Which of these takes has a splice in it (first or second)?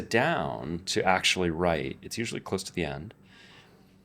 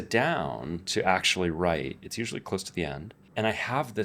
second